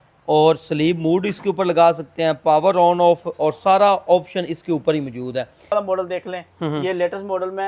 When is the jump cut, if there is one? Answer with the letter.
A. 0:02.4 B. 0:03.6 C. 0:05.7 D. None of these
C